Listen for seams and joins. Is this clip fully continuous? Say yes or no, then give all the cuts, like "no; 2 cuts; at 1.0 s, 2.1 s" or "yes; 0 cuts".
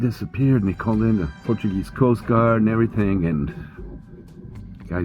no; 1 cut; at 1.3 s